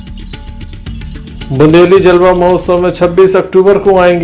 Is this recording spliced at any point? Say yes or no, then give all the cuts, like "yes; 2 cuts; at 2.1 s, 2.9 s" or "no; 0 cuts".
no; 0 cuts